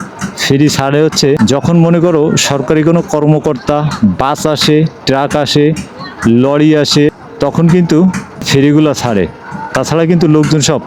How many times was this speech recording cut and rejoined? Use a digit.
1